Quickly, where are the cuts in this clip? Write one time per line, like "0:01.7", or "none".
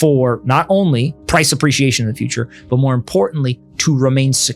0:01.2